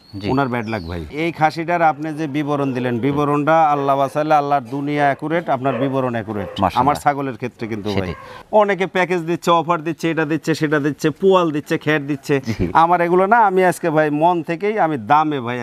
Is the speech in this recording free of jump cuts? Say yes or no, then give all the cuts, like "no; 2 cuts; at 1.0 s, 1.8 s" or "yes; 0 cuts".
no; 2 cuts; at 1.0 s, 8.3 s